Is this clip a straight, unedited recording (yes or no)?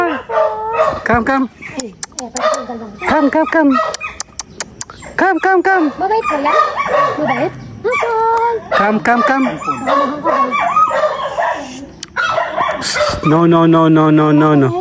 yes